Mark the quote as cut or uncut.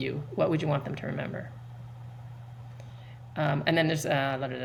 uncut